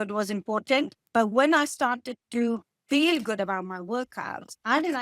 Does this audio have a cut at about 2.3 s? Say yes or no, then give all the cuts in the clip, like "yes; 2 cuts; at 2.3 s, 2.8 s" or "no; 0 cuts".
no; 1 cut; at 1.0 s